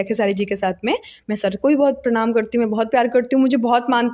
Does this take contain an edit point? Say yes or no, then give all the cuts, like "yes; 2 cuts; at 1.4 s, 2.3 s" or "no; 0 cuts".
no; 0 cuts